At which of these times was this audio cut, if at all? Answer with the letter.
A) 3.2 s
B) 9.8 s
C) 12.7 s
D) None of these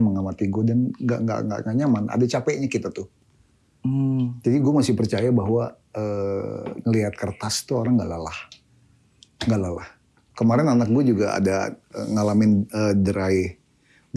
D